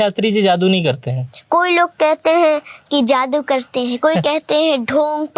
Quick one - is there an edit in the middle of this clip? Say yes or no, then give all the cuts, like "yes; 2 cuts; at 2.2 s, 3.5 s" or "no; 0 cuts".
no; 0 cuts